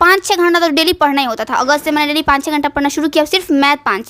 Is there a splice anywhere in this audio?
no; 0 cuts

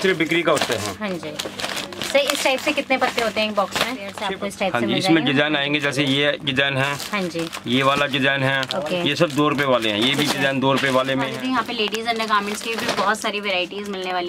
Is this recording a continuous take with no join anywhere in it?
no; 2 cuts; at 4.2 s, 11.3 s

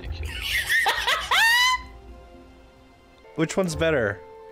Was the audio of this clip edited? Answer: yes; 1 cut; at 3.1 s

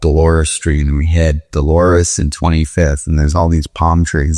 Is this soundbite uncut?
yes; 0 cuts

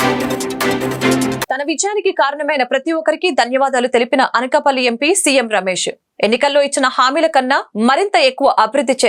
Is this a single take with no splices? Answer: no; 1 cut; at 1.4 s

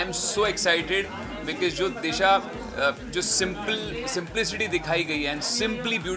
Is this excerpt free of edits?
yes; 0 cuts

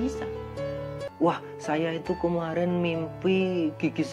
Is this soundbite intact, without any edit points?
no; 1 cut; at 1.0 s

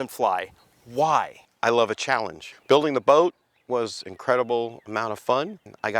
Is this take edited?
yes; 1 cut; at 1.4 s

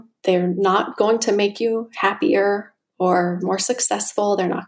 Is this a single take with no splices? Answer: yes; 0 cuts

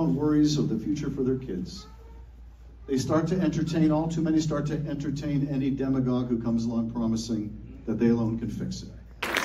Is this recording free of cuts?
no; 2 cuts; at 1.6 s, 6.7 s

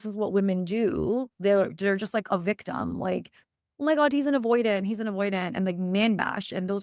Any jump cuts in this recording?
no; 0 cuts

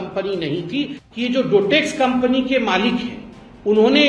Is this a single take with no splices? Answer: no; 1 cut; at 1.0 s

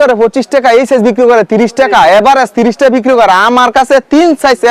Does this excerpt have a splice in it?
no; 0 cuts

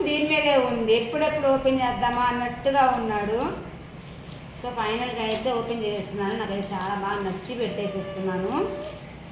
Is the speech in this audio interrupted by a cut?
no; 0 cuts

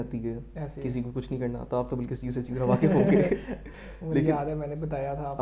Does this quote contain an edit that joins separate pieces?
no; 0 cuts

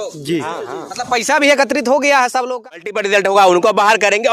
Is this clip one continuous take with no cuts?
no; 1 cut; at 2.5 s

